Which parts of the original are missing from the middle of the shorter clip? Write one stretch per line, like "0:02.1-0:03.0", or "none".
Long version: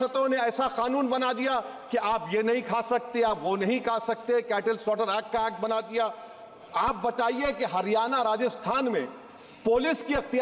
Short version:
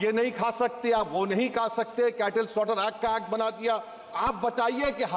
0:06.3-0:06.6